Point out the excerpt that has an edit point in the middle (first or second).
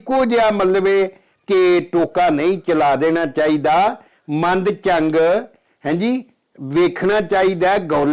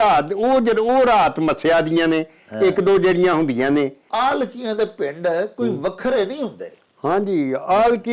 second